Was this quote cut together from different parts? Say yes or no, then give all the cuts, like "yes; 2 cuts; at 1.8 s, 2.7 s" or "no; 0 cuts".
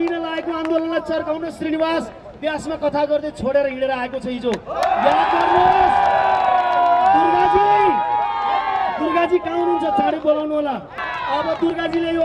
yes; 1 cut; at 11.1 s